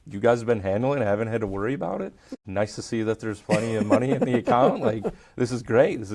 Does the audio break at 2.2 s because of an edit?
yes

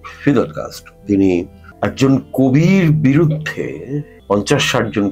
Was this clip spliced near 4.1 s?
yes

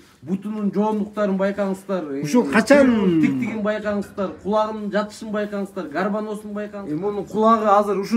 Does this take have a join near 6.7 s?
yes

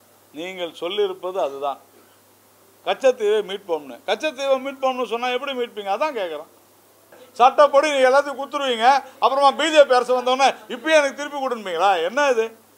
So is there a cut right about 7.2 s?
yes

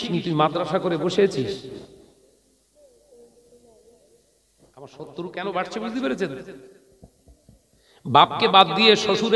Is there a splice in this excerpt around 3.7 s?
no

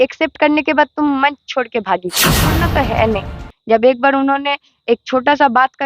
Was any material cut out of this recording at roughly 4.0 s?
no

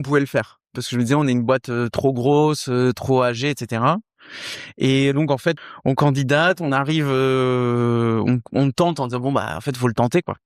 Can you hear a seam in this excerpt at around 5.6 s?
yes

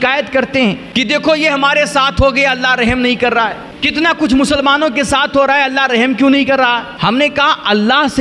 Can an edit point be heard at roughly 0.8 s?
yes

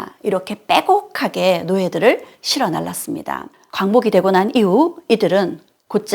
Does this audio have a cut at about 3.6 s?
yes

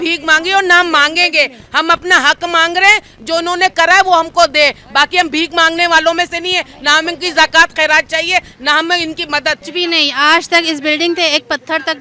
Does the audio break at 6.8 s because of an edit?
no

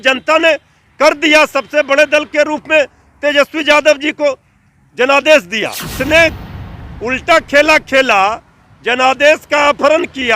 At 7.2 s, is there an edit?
no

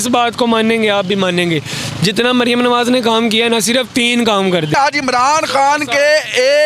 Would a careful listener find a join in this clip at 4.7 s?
yes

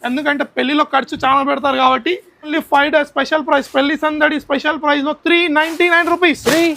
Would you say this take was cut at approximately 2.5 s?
yes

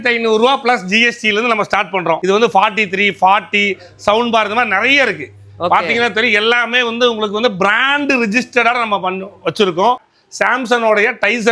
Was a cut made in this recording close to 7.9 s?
no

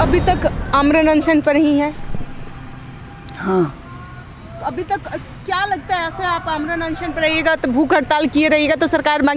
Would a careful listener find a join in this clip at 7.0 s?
no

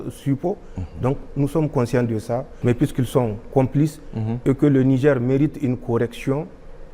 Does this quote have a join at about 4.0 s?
no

